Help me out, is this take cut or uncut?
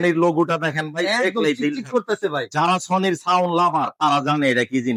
uncut